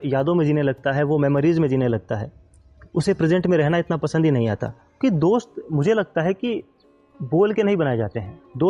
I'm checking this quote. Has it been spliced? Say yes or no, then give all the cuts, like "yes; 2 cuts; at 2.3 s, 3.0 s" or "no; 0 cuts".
yes; 1 cut; at 5.0 s